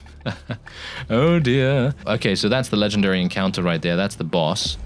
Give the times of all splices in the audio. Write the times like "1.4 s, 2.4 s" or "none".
2.0 s